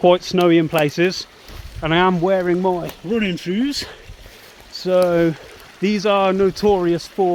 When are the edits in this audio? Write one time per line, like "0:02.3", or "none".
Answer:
none